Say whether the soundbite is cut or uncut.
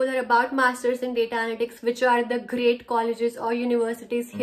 uncut